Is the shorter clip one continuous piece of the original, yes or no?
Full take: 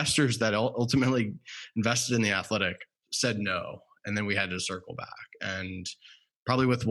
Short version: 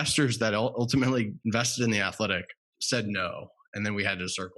no